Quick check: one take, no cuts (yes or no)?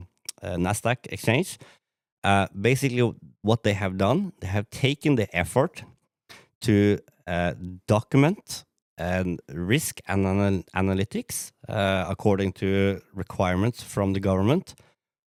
yes